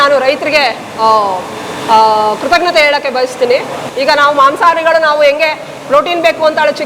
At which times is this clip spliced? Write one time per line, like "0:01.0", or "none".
0:03.8